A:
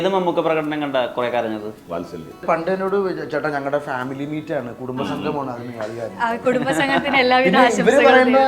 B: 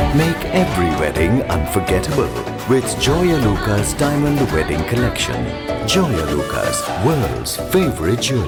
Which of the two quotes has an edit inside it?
A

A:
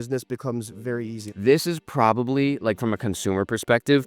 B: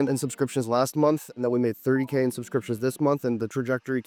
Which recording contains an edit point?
A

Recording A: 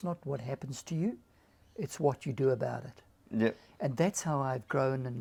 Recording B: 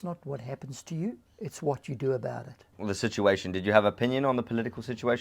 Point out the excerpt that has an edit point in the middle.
B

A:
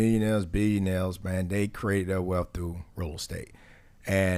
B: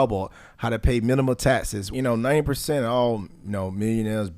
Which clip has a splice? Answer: B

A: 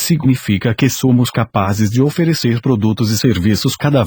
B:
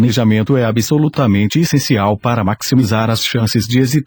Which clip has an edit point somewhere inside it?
A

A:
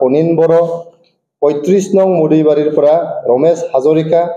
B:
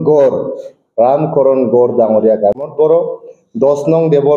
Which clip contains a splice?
B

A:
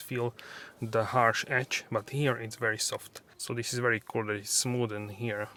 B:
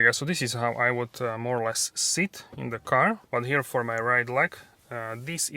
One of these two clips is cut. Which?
B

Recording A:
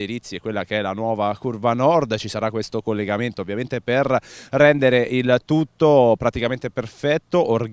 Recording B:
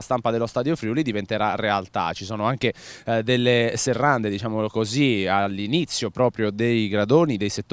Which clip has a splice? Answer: A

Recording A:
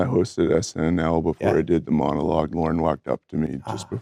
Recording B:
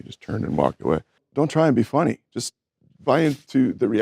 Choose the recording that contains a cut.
B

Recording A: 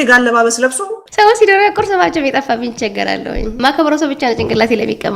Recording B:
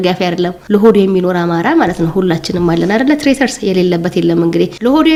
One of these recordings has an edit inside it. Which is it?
A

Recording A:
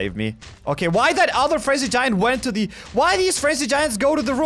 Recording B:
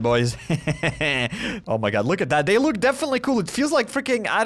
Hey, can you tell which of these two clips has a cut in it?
B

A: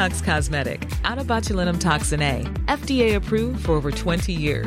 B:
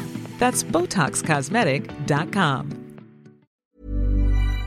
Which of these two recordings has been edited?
B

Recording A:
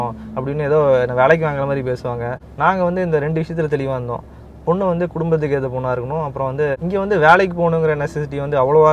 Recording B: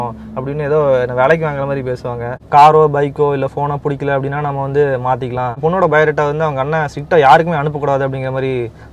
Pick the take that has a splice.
B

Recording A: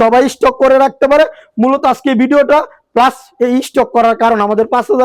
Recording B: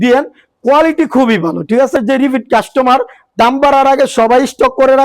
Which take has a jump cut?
B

